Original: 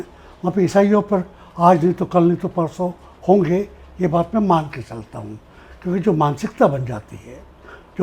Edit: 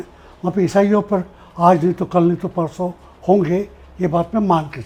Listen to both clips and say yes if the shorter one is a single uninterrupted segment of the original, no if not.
yes